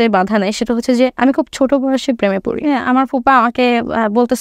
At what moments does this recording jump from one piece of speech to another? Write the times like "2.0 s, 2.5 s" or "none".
2.7 s